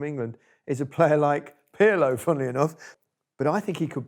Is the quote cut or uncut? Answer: cut